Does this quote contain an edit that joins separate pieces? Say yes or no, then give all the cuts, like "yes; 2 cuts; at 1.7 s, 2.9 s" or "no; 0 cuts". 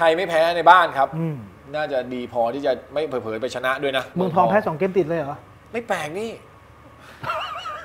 yes; 1 cut; at 4.1 s